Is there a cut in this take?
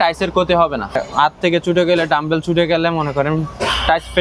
yes; 1 cut; at 1.0 s

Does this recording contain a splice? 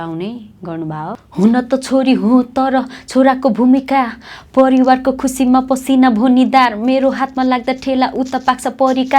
yes; 1 cut; at 1.1 s

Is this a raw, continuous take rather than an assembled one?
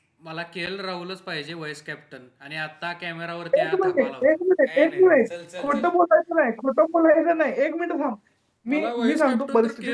yes; 0 cuts

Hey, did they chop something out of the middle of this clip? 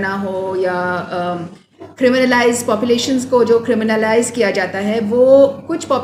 no; 0 cuts

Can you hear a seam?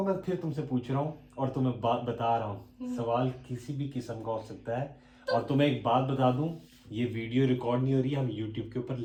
no; 0 cuts

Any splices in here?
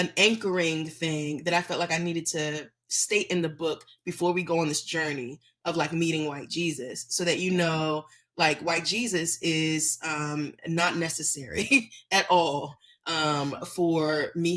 no; 0 cuts

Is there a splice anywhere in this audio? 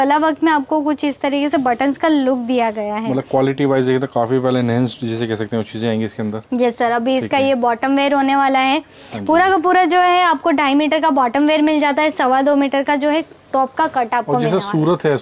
no; 0 cuts

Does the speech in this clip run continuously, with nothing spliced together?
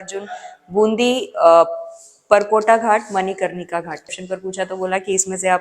no; 1 cut; at 4.1 s

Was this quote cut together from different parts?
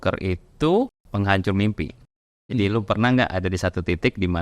yes; 2 cuts; at 1.0 s, 2.5 s

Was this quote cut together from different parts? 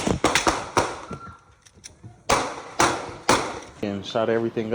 no; 0 cuts

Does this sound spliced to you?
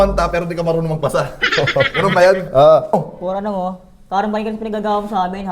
yes; 1 cut; at 3.1 s

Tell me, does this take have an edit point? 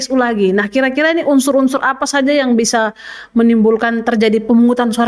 no; 0 cuts

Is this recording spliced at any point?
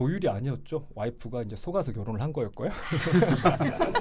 no; 0 cuts

